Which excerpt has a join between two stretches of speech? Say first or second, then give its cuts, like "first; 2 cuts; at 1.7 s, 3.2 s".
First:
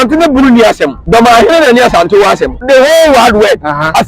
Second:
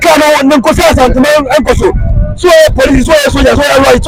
first; 2 cuts; at 1.0 s, 2.6 s